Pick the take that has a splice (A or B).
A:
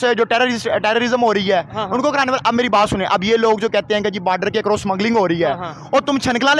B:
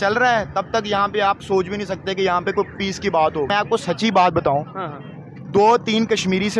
B